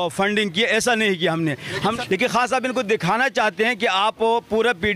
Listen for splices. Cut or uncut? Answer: cut